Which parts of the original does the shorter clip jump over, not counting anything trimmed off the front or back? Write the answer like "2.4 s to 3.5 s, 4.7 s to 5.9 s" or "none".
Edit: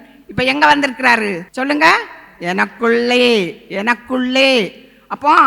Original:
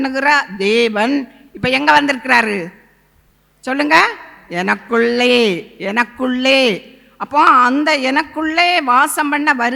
2.7 s to 3.6 s

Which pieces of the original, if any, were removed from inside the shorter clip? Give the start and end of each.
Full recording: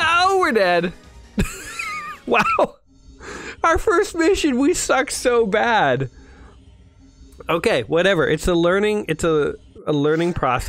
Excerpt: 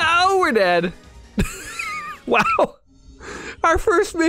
none

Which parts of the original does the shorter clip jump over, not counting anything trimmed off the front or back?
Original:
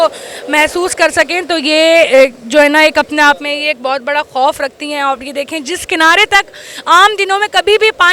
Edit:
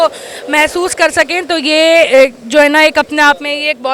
none

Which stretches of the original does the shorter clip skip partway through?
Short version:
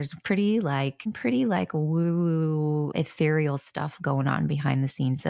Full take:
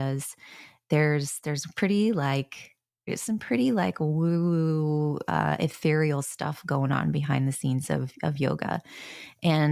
2.6 s to 3.3 s, 5.2 s to 5.6 s

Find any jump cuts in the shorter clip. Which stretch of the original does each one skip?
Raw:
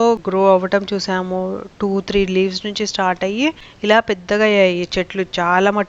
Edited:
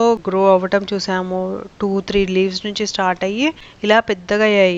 none

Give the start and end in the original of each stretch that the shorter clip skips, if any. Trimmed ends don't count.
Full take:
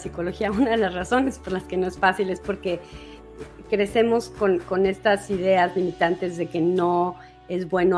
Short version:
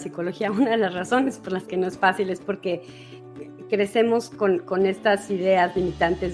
none

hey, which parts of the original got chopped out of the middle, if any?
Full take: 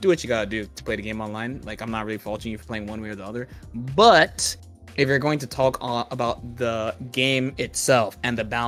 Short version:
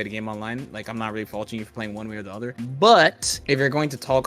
3.5 s to 3.7 s, 4.5 s to 4.8 s

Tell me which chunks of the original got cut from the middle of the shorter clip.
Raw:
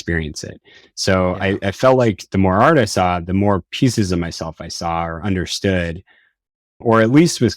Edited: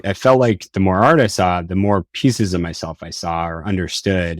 none

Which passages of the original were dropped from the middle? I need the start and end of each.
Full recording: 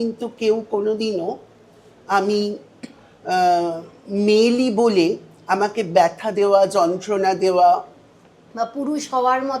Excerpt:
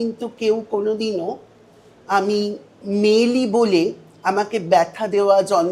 2.7 s to 3.9 s

